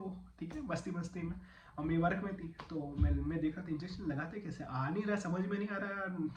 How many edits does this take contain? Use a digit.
0